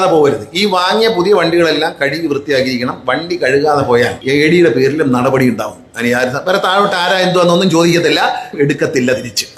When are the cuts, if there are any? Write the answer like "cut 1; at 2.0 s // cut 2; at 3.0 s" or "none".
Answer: cut 1; at 4.2 s // cut 2; at 8.5 s